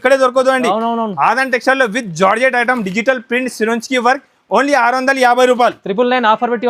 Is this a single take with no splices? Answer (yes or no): yes